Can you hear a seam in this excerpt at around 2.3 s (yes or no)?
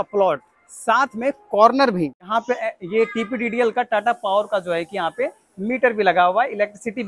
yes